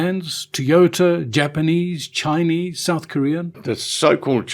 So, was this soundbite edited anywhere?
yes; 1 cut; at 3.6 s

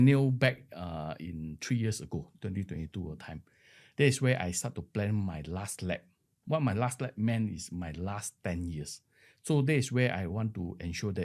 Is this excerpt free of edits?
yes; 0 cuts

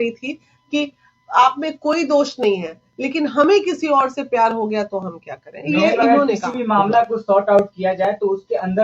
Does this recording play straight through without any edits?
yes; 0 cuts

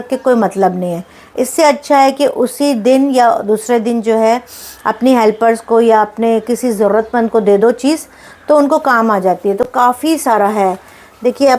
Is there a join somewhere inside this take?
no; 0 cuts

